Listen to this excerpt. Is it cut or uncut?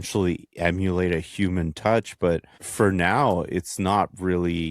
cut